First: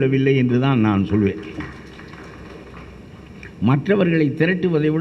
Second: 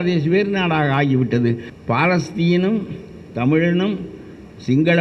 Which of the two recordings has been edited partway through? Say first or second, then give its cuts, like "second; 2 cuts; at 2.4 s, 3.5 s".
second; 1 cut; at 1.7 s